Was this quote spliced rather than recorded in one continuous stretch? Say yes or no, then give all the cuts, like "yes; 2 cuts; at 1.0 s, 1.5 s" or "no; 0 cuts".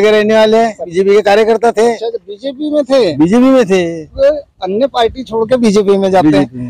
yes; 2 cuts; at 0.9 s, 4.1 s